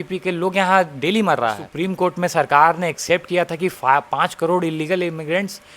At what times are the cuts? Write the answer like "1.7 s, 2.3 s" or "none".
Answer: 1.6 s